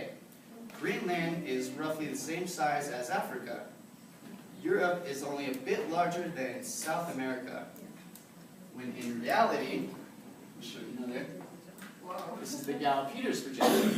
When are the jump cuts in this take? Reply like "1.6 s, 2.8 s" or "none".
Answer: 1.5 s